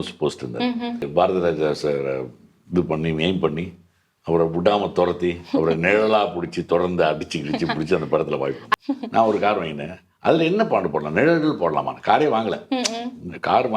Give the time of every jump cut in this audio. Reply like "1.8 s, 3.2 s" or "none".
1.1 s, 8.6 s